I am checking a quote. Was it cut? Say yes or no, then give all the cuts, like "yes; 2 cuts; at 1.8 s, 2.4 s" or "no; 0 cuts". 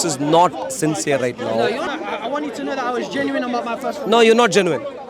yes; 1 cut; at 1.9 s